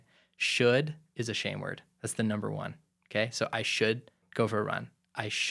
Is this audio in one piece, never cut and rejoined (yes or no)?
no